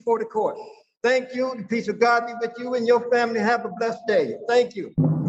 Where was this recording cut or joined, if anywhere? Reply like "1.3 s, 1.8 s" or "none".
none